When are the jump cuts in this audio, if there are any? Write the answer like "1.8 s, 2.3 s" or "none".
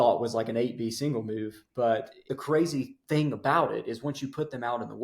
2.4 s